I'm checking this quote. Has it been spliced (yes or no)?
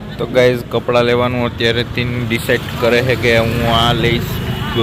no